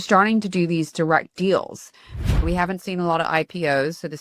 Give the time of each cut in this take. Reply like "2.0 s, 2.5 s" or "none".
2.2 s